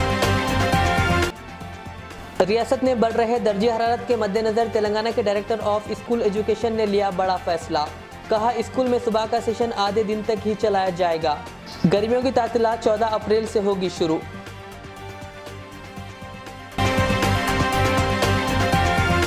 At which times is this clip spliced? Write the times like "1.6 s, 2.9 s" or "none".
1.1 s